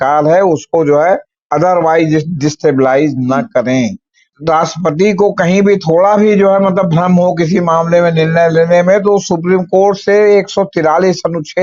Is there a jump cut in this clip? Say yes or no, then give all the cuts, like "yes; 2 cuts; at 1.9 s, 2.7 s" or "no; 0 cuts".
yes; 1 cut; at 4.3 s